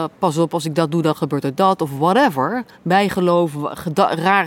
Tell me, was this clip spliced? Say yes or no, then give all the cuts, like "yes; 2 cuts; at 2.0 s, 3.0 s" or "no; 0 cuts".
no; 0 cuts